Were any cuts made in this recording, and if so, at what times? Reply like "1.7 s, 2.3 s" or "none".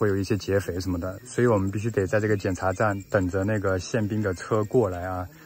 none